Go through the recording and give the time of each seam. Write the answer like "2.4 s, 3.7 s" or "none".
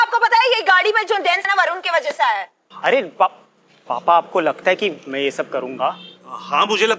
1.4 s